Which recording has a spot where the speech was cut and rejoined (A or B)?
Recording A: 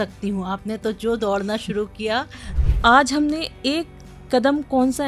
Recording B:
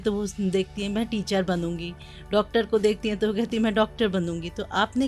A